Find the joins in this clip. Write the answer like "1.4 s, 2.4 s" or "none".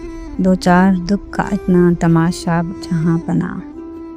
none